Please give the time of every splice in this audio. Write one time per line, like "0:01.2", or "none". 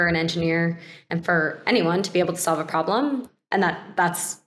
none